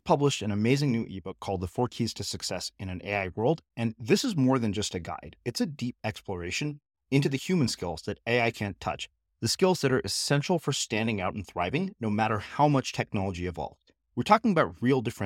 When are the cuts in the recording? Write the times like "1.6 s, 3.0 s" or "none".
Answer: none

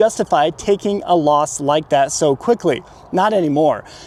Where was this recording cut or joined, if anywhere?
none

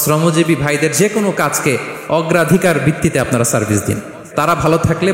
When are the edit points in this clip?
4.2 s

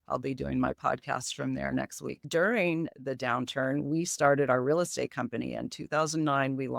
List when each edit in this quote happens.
2.1 s

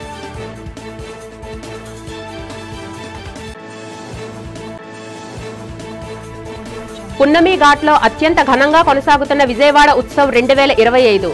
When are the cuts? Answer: 1.6 s

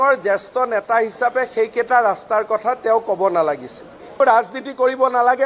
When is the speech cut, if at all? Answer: 4.2 s

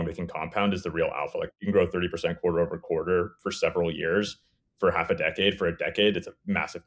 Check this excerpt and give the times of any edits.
none

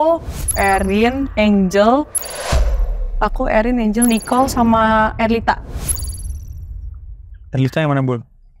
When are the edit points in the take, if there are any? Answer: none

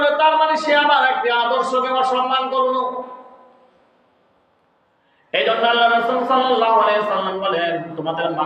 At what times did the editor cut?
none

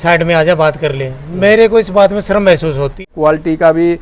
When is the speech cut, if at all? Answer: 3.0 s

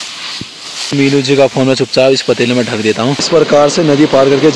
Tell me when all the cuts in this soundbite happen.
0.9 s, 3.3 s

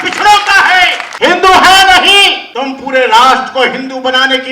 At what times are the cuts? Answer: 1.0 s, 2.4 s

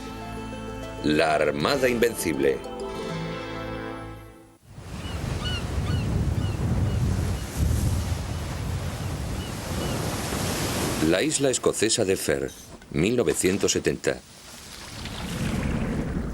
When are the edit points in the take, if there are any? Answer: 14.6 s

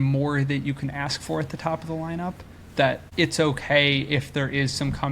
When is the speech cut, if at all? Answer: 3.1 s

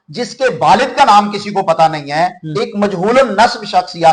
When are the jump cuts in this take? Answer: none

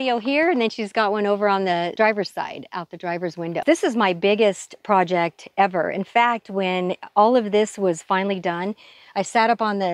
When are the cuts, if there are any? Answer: 1.9 s, 3.6 s

